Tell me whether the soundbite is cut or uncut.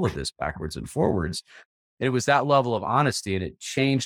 uncut